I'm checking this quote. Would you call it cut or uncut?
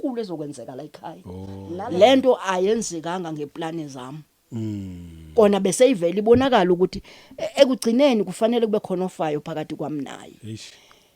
cut